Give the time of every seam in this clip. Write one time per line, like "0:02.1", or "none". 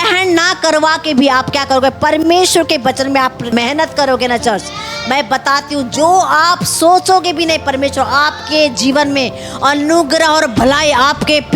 0:03.5